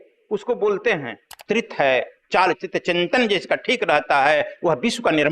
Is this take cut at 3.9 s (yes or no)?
no